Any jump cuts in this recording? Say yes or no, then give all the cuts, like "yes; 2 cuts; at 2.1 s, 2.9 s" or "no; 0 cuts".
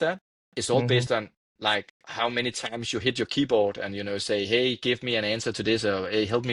no; 0 cuts